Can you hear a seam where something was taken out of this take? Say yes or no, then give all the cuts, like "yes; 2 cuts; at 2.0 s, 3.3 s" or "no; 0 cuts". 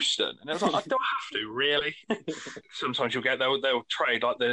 yes; 1 cut; at 2.6 s